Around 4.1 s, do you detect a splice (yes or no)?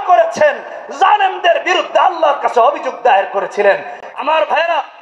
no